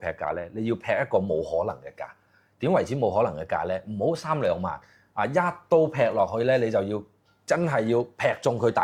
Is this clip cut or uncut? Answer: uncut